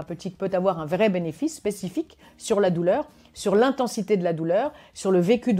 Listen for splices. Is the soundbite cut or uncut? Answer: uncut